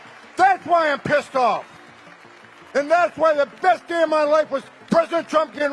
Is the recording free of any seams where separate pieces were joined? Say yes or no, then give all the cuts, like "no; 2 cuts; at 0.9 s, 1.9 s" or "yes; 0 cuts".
yes; 0 cuts